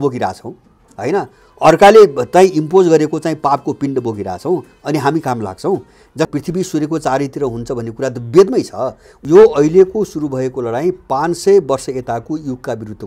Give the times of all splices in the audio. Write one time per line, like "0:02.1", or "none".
0:06.3
0:09.1